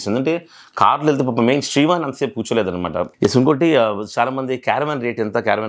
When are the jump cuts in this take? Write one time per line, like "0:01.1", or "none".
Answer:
0:03.1